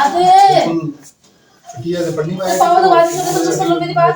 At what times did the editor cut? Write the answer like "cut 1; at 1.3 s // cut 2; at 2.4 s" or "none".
none